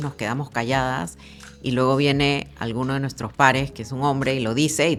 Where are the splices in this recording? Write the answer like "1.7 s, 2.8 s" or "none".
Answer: none